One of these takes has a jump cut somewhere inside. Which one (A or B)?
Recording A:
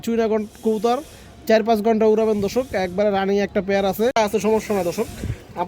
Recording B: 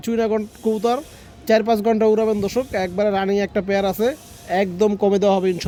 A